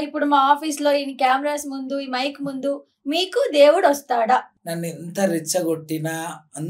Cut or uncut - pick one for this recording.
cut